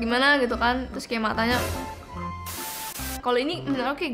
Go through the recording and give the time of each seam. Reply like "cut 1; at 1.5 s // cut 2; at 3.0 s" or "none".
cut 1; at 3.2 s